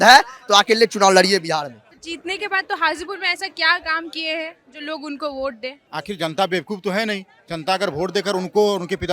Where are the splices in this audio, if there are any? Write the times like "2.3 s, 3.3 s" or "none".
1.8 s, 5.8 s